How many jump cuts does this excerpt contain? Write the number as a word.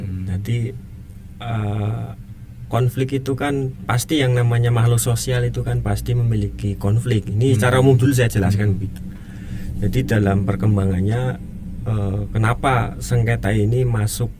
zero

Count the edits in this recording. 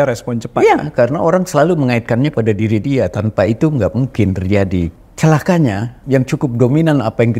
two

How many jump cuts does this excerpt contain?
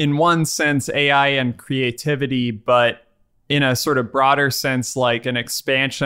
zero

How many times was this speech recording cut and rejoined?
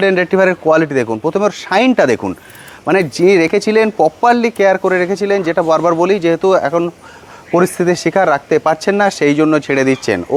zero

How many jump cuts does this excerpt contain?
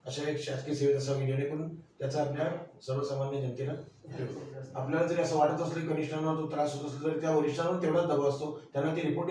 one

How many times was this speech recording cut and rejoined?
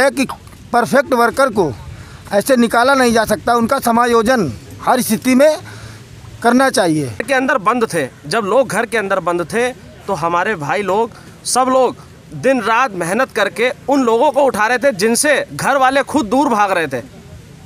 one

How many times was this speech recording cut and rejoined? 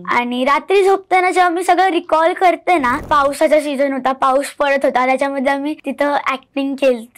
two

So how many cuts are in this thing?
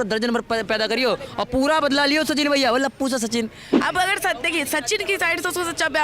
one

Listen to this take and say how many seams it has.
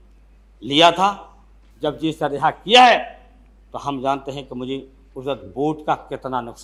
zero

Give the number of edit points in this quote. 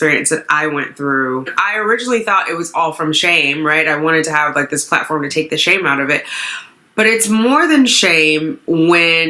one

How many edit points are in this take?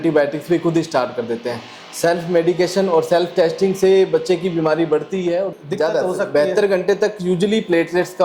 one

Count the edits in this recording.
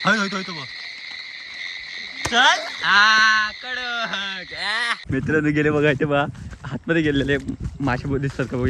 one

